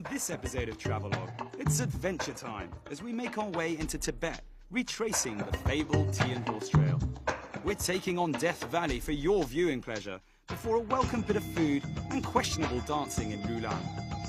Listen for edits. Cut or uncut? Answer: uncut